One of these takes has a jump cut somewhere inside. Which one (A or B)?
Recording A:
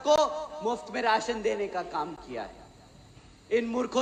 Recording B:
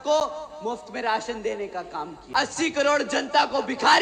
B